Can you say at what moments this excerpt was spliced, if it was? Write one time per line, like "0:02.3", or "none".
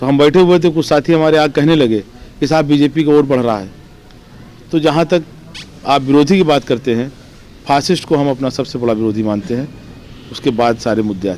none